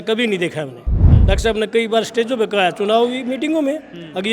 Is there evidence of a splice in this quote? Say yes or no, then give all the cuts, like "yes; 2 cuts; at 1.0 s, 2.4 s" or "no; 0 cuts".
yes; 1 cut; at 1.1 s